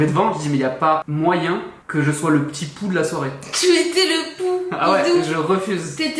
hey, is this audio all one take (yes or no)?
yes